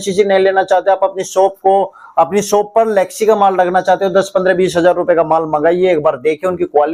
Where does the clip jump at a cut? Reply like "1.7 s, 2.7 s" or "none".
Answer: none